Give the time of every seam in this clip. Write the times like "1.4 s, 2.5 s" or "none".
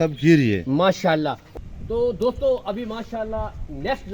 1.4 s